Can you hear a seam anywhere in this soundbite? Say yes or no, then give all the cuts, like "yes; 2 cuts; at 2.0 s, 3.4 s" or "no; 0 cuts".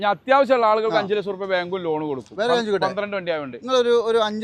no; 0 cuts